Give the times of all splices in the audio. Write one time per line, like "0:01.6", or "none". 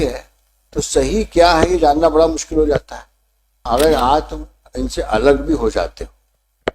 0:03.6